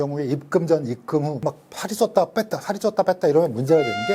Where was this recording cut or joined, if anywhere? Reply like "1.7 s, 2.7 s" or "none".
1.3 s